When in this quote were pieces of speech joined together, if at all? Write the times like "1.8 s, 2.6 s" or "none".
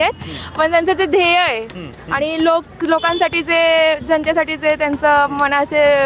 none